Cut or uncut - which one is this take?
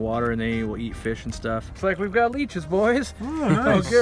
cut